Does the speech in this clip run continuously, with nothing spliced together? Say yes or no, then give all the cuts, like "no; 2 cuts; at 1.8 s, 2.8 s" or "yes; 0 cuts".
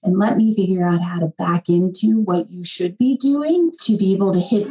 no; 1 cut; at 3.8 s